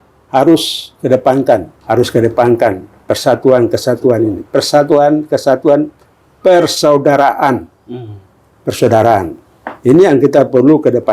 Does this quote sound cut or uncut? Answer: cut